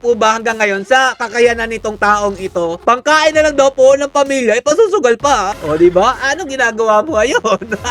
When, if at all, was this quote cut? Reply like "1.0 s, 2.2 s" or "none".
2.8 s, 5.5 s